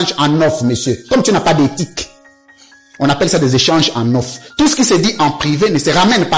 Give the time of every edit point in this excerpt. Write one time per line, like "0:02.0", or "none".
none